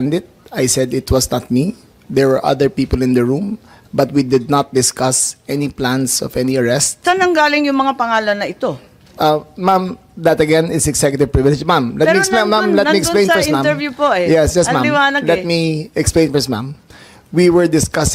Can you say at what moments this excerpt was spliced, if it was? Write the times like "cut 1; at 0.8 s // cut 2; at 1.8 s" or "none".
cut 1; at 1.0 s